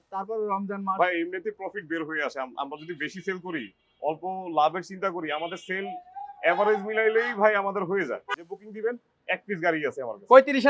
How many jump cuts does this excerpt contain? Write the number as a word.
one